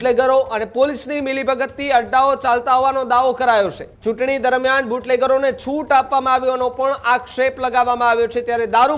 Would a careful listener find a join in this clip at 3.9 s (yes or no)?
yes